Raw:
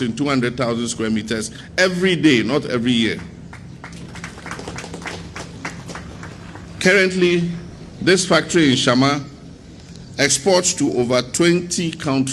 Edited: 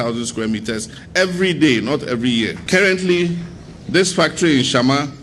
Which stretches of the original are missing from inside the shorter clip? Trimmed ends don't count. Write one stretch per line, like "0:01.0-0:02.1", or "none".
0:03.2-0:06.7